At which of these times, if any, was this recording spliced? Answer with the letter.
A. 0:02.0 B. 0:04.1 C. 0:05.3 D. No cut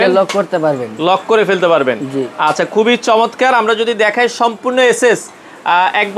D